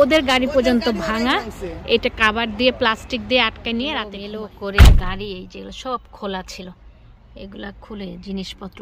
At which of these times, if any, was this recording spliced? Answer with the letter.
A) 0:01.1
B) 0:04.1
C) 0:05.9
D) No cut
B